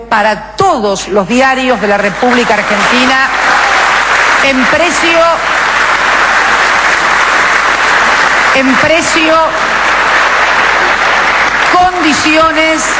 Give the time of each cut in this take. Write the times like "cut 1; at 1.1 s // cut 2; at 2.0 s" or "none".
none